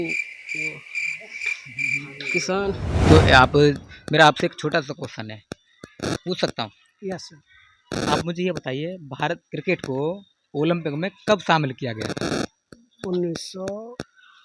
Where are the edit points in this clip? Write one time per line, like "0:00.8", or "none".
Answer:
0:02.9